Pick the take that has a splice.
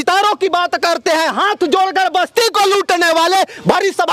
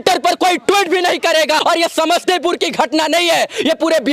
second; 1 cut; at 1.6 s

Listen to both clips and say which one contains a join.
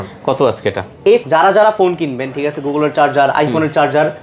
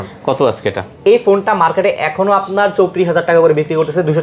first; 1 cut; at 1.2 s

